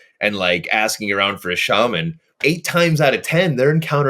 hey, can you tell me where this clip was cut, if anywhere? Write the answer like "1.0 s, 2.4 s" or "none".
2.2 s